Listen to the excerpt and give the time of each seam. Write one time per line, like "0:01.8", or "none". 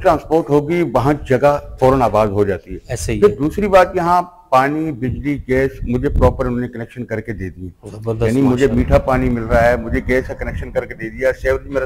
none